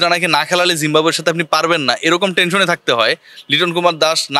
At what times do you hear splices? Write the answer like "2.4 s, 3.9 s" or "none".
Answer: none